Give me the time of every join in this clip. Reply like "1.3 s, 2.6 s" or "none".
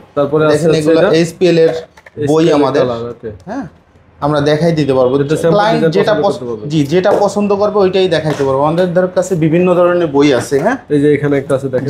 none